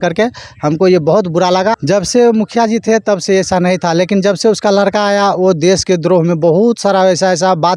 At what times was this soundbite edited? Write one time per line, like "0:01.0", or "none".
0:01.8